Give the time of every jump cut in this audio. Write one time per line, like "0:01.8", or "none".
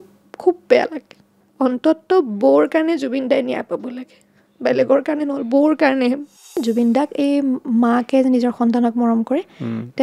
0:01.4
0:06.6